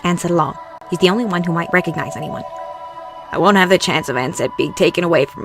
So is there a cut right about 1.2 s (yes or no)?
yes